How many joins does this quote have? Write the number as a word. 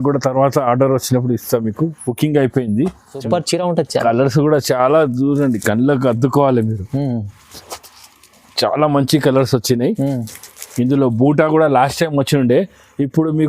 one